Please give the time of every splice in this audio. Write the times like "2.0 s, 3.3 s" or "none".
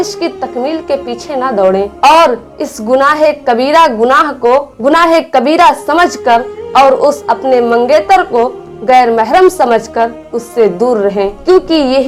none